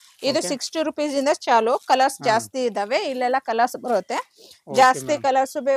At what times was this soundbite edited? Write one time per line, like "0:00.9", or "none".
none